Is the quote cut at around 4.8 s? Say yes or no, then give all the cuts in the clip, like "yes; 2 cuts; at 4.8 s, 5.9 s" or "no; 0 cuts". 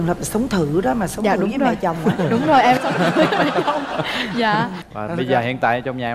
yes; 1 cut; at 4.8 s